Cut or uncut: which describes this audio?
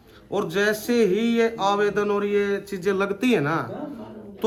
uncut